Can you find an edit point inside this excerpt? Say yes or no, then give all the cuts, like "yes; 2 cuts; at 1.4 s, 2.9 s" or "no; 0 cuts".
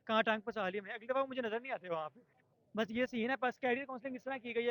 no; 0 cuts